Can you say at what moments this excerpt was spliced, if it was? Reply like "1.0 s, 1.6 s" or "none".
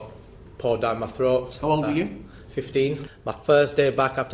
3.1 s